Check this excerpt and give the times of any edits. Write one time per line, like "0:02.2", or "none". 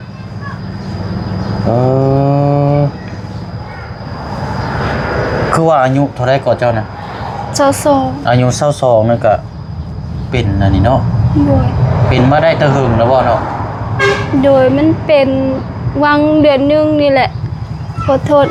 none